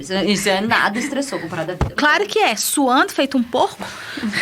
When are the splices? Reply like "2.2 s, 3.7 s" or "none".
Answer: 1.9 s